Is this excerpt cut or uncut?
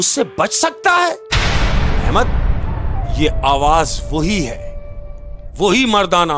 uncut